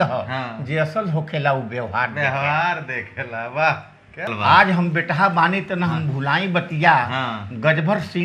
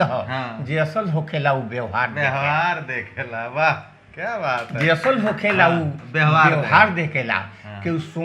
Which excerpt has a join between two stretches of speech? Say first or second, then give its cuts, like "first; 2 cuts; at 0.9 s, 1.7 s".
first; 1 cut; at 4.3 s